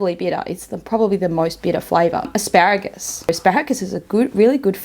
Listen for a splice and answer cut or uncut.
cut